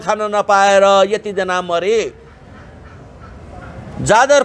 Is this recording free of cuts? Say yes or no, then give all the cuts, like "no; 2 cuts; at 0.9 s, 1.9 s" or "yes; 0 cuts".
yes; 0 cuts